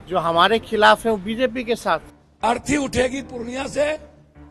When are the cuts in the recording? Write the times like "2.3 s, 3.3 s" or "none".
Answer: 2.3 s